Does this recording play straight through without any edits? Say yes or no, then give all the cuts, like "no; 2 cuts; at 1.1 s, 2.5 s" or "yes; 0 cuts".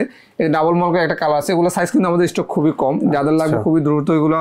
yes; 0 cuts